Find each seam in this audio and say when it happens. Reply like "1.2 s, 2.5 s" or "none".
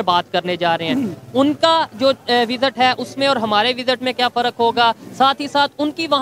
none